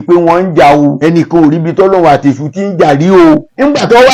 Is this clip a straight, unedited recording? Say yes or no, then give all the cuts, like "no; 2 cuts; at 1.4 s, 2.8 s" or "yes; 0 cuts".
yes; 0 cuts